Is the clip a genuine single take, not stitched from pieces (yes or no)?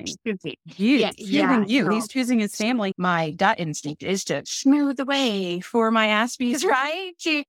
no